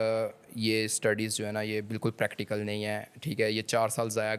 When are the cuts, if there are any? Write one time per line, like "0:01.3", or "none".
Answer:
none